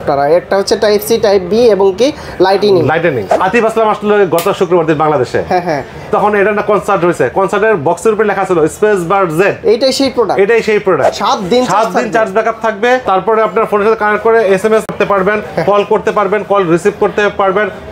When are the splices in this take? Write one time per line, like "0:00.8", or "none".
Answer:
0:03.3
0:11.1